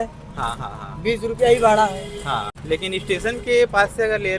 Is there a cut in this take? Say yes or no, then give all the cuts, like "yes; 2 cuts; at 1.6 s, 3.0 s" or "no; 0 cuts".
yes; 1 cut; at 2.5 s